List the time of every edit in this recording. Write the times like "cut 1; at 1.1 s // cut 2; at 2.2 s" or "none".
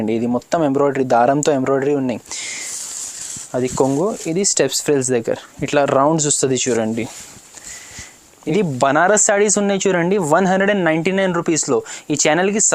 cut 1; at 8.4 s